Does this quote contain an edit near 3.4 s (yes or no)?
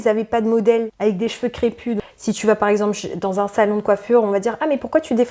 no